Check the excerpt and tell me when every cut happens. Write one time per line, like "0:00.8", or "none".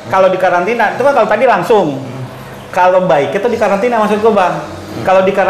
none